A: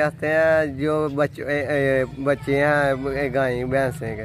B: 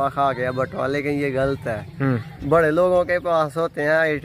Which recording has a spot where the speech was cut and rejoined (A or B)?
B